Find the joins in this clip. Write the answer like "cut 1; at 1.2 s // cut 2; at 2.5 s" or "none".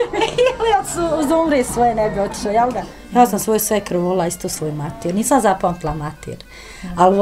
cut 1; at 2.8 s